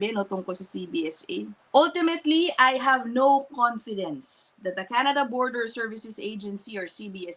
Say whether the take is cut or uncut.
cut